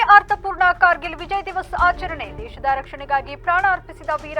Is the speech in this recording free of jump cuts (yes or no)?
yes